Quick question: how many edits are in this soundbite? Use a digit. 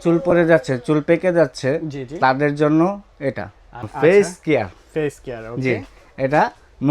1